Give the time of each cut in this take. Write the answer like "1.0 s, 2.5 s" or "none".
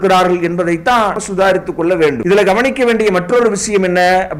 1.2 s, 2.2 s